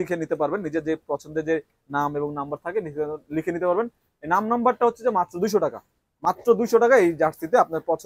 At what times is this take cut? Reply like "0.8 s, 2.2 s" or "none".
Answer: none